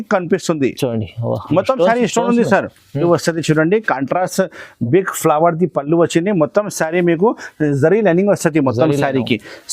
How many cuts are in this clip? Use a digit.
1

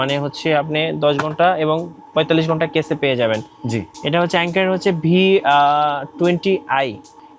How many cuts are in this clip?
0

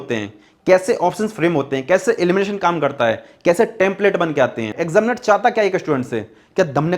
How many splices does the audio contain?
1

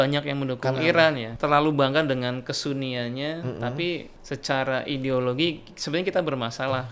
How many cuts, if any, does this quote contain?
2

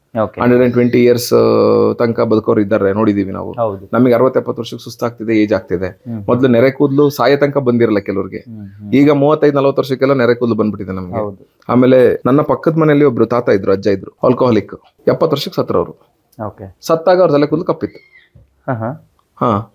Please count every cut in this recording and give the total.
0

